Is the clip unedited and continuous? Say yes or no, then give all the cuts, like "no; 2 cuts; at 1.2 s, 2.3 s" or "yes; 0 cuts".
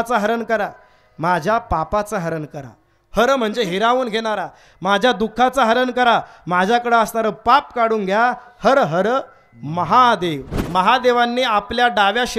no; 1 cut; at 10.5 s